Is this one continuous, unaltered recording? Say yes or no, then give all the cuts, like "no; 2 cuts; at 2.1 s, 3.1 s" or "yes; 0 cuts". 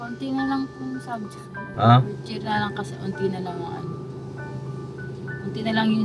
no; 1 cut; at 1.7 s